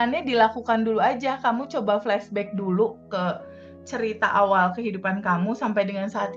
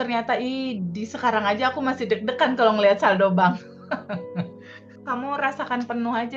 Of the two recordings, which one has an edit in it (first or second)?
second